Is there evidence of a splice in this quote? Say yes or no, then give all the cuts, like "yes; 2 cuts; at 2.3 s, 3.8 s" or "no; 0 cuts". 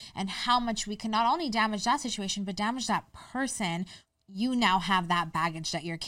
yes; 1 cut; at 4.0 s